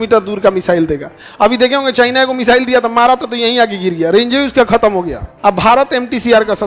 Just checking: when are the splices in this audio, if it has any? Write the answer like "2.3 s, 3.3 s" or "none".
5.2 s